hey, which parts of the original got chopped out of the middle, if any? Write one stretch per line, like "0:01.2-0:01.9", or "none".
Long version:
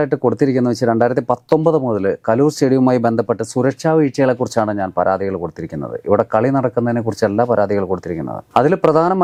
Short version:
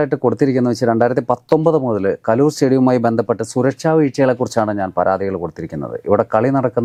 none

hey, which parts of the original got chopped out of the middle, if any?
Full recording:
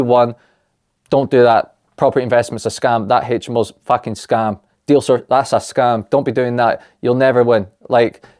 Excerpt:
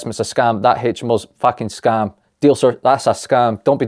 none

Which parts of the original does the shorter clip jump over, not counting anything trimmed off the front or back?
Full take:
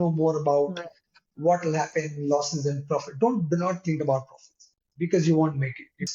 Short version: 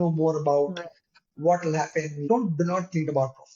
0:02.2-0:03.1

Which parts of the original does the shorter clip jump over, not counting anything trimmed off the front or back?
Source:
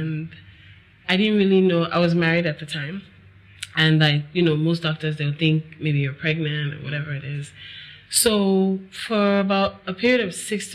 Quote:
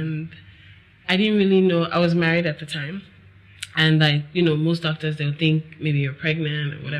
none

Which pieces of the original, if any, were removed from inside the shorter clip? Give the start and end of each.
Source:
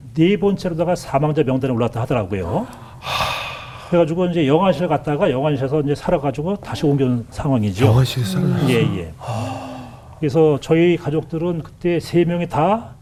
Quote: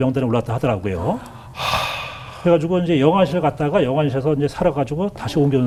none

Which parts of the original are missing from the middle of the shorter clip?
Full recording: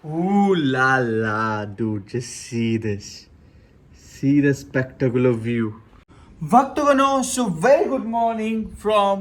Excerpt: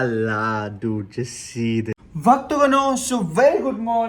0:03.0-0:06.3

